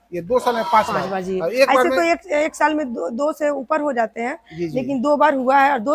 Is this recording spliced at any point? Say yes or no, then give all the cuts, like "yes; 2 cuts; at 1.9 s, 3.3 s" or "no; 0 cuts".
no; 0 cuts